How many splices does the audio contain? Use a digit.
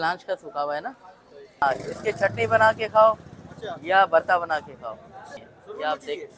2